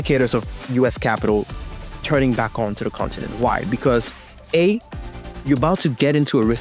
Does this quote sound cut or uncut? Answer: uncut